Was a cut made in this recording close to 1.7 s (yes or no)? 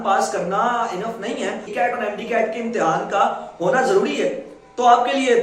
yes